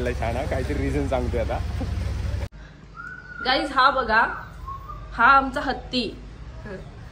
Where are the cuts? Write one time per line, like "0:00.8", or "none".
0:02.5